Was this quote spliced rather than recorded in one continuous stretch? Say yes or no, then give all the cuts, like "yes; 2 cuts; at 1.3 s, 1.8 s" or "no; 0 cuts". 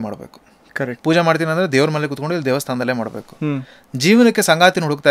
no; 0 cuts